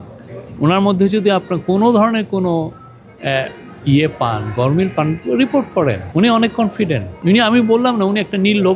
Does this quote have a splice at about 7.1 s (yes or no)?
yes